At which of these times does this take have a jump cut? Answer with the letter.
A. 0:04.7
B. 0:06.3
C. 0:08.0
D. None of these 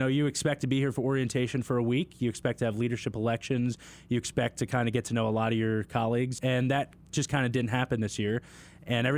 B